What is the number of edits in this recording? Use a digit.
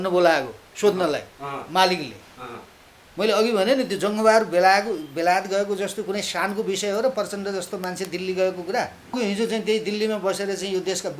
1